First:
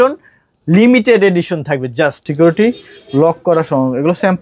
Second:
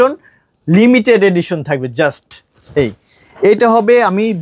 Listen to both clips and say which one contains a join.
first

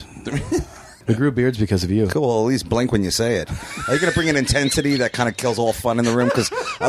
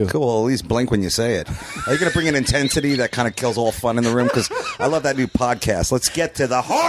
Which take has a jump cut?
first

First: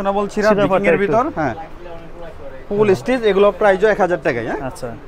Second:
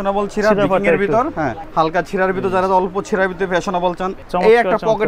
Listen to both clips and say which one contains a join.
second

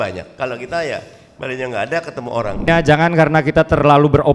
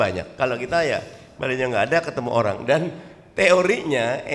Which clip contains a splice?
first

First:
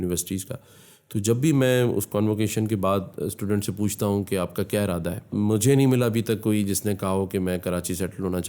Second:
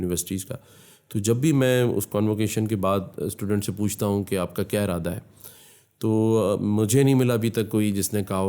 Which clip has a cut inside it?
first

